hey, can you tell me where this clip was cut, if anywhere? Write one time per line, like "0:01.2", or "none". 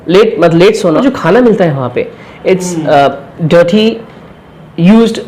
0:01.0